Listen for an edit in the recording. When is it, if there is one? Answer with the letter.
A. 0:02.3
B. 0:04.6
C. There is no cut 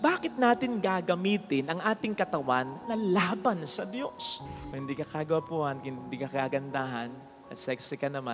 B